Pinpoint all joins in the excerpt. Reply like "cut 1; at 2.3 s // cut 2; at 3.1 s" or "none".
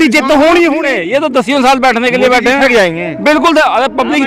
cut 1; at 0.9 s